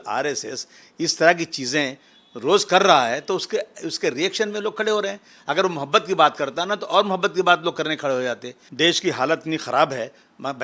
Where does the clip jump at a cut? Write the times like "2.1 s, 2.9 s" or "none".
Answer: 8.6 s